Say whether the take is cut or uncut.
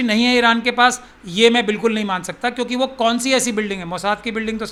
uncut